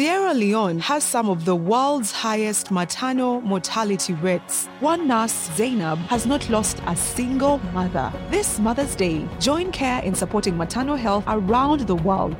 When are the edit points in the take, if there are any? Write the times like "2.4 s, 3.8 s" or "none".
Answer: none